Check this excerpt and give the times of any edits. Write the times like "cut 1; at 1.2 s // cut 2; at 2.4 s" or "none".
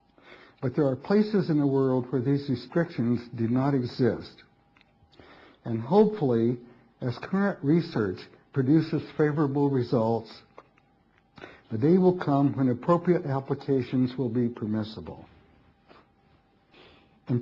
cut 1; at 1.3 s